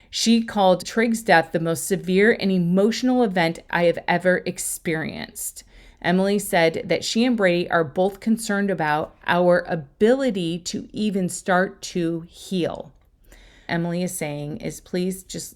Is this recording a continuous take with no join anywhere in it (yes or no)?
no